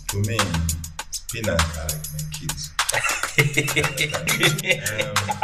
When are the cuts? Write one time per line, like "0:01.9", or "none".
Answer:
0:04.3